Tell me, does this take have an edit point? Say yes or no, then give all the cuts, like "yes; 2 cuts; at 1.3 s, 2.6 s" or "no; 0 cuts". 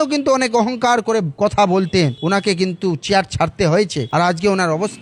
no; 0 cuts